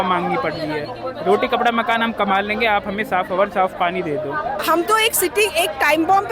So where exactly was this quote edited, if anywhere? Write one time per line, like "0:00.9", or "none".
0:04.6